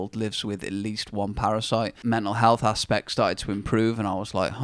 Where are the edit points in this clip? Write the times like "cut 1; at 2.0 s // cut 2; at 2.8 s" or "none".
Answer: cut 1; at 2.0 s